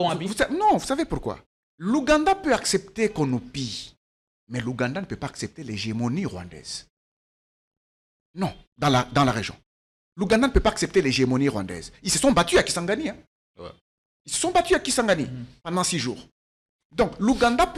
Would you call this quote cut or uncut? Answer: uncut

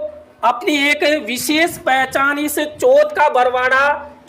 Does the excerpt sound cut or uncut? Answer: uncut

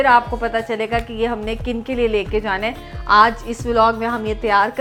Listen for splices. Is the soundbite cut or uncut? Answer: uncut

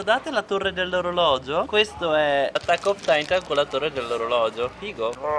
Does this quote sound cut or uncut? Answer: uncut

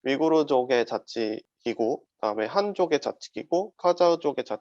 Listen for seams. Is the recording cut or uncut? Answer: cut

